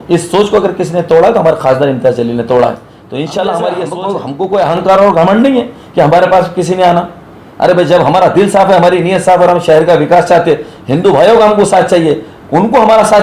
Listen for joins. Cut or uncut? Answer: cut